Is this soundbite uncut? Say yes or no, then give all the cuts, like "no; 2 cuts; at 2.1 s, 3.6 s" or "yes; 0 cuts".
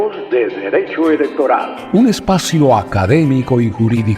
no; 1 cut; at 1.8 s